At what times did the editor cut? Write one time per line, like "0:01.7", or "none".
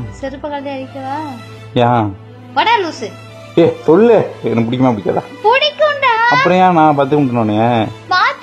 none